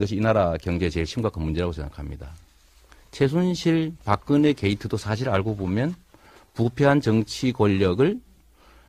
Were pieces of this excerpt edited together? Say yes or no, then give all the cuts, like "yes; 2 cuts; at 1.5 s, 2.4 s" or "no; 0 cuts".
yes; 1 cut; at 5.1 s